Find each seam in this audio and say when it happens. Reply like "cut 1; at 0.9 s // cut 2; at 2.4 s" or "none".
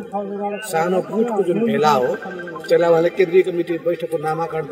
none